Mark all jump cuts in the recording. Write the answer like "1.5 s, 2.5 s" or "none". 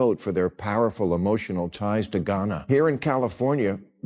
2.6 s